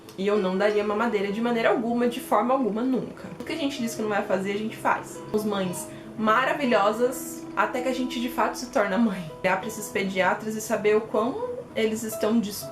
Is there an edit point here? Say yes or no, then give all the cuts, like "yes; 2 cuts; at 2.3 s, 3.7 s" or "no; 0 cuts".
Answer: yes; 3 cuts; at 3.4 s, 5.3 s, 9.4 s